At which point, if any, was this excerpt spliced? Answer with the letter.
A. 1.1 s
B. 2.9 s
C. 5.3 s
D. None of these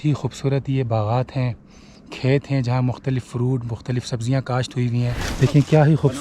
C